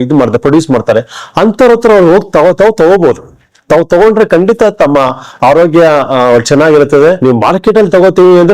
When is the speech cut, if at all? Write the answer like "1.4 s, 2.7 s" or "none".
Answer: 7.2 s